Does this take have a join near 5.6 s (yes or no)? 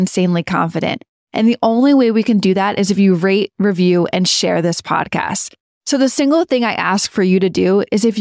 no